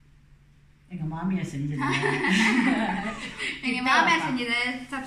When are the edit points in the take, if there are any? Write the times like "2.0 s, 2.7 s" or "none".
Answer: none